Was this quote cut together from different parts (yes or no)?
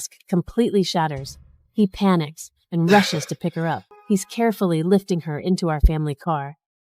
yes